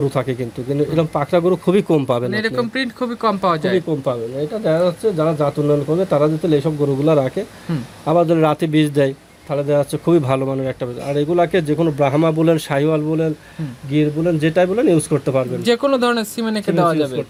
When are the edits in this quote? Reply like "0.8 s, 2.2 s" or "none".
none